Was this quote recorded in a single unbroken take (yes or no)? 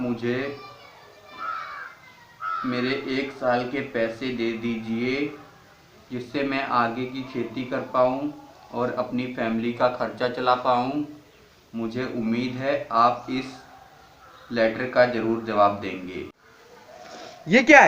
no